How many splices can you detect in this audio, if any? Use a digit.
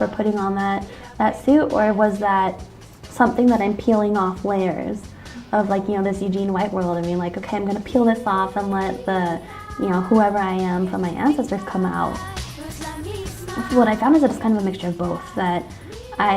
1